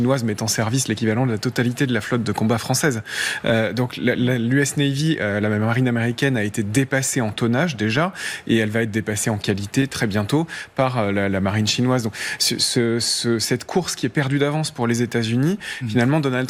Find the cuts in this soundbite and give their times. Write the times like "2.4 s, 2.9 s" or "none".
none